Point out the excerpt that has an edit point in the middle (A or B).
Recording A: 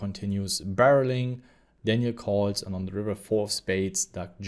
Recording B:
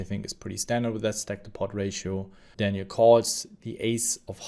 B